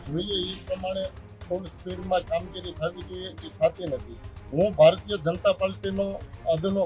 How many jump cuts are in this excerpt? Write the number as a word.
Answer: zero